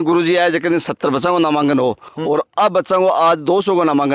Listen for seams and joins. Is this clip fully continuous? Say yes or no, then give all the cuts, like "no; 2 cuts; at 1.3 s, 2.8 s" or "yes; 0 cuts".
yes; 0 cuts